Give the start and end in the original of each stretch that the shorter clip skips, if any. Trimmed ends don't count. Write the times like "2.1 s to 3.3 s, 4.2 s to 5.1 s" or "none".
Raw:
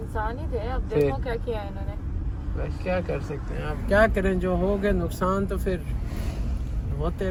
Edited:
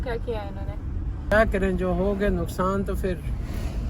2.5 s to 3.9 s